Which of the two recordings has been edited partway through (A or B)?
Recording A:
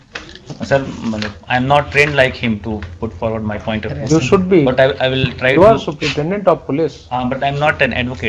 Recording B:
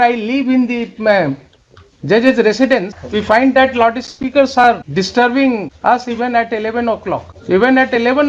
B